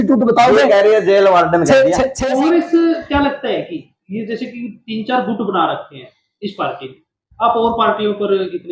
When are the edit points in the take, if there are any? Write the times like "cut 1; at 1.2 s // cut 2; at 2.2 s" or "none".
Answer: cut 1; at 2.2 s